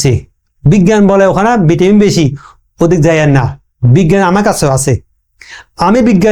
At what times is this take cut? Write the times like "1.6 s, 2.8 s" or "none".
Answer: none